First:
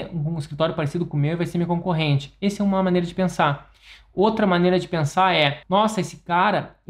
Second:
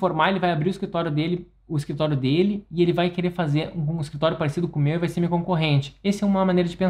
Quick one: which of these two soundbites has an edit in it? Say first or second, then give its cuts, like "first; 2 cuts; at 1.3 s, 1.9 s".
first; 1 cut; at 5.6 s